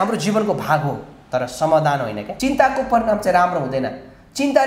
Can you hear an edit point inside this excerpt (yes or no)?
yes